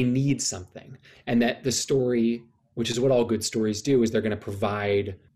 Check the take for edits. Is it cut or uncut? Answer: uncut